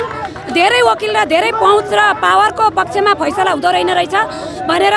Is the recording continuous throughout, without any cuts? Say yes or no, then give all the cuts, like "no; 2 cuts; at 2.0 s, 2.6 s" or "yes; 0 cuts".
yes; 0 cuts